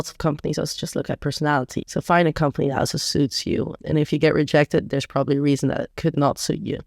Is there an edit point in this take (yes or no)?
yes